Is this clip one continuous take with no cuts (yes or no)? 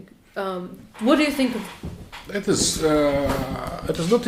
yes